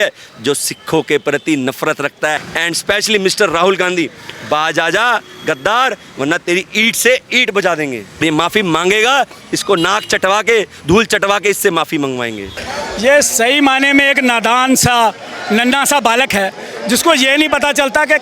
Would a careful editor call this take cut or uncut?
cut